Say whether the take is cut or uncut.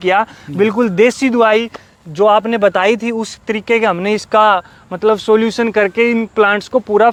uncut